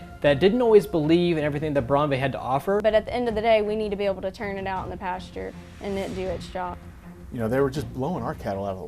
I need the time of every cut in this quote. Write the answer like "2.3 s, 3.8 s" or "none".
2.8 s, 6.8 s